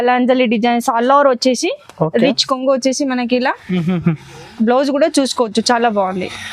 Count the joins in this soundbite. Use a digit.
0